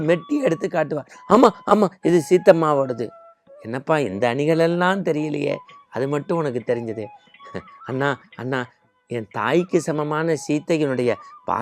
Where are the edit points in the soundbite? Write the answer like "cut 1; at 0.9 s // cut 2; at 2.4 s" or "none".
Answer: none